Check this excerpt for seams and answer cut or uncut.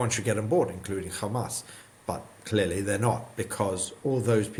uncut